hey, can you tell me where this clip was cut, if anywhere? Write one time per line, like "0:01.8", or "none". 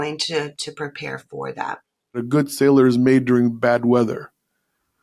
0:02.2